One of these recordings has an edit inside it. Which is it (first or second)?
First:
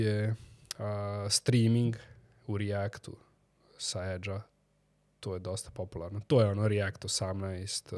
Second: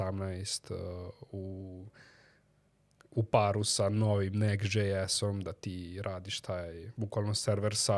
second